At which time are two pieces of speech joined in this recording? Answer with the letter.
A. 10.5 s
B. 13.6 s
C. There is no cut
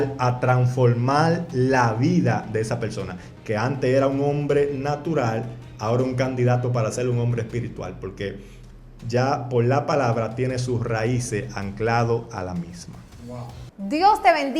B